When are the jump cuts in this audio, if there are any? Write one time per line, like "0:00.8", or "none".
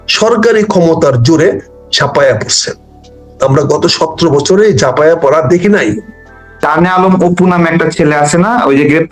0:06.6